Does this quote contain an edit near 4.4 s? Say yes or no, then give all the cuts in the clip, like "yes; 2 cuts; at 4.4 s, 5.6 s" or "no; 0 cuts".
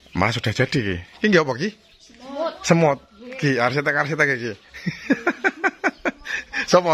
no; 0 cuts